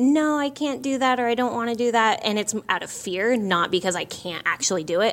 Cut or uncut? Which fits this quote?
uncut